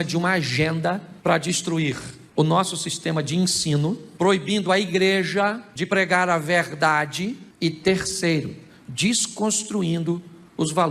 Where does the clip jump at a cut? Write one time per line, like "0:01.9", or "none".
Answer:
0:01.1
0:02.1
0:04.1
0:05.7
0:07.5

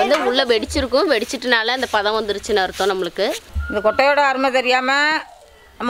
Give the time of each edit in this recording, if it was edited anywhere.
0:03.5

